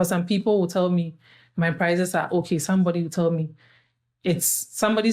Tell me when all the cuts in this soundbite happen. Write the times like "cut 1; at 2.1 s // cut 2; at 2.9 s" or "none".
none